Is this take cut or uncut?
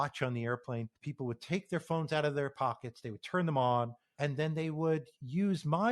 cut